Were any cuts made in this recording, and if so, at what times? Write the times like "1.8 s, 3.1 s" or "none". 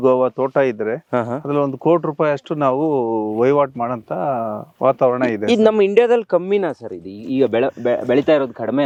none